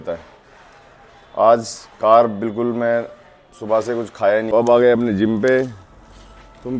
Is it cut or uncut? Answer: cut